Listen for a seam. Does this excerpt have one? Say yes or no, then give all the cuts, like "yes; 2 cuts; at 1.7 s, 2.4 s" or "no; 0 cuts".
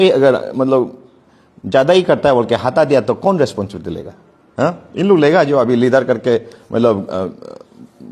no; 0 cuts